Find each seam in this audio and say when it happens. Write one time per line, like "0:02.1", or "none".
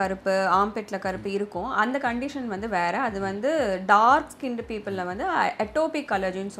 none